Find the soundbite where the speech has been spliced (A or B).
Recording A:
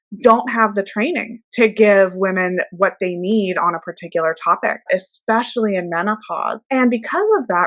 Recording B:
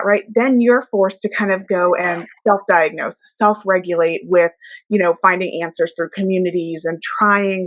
A